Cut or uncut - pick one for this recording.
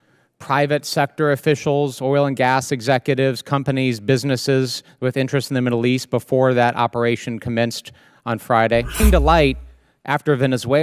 cut